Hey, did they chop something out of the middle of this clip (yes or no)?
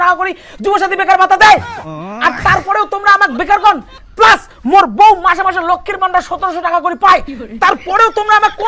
no